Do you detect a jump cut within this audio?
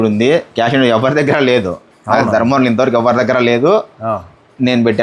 no; 0 cuts

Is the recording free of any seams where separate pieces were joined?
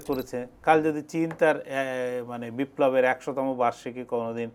yes; 0 cuts

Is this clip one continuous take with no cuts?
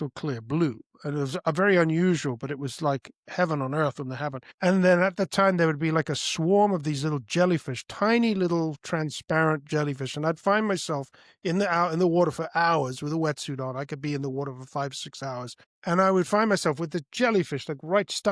no; 2 cuts; at 4.4 s, 15.6 s

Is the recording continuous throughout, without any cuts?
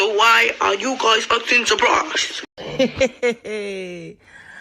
no; 1 cut; at 2.3 s

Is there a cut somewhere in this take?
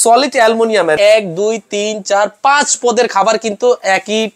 yes; 1 cut; at 0.9 s

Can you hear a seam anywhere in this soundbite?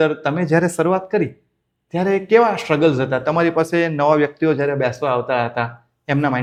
no; 0 cuts

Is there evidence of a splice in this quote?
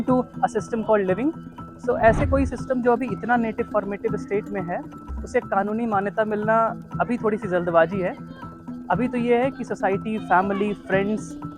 no; 0 cuts

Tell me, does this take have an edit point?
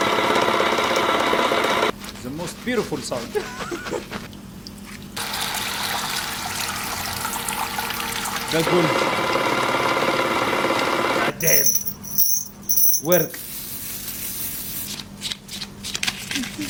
no; 0 cuts

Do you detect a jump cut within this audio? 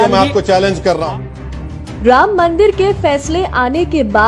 no; 0 cuts

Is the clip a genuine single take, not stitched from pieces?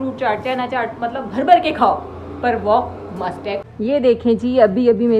no; 1 cut; at 3.7 s

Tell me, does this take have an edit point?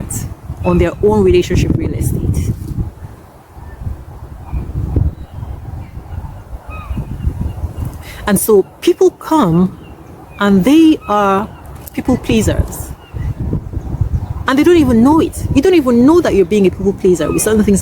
no; 0 cuts

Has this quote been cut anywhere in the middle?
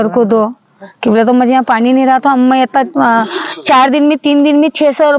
no; 0 cuts

